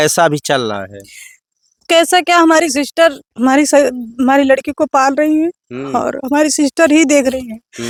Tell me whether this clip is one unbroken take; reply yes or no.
yes